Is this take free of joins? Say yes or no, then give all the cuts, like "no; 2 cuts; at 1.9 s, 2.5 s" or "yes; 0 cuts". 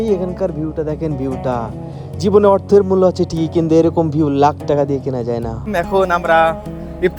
no; 1 cut; at 5.7 s